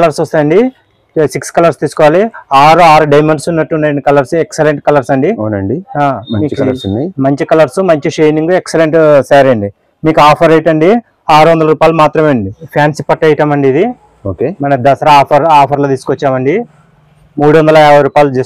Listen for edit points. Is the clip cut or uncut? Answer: cut